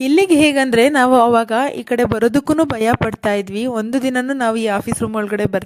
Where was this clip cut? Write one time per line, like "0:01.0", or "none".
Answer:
none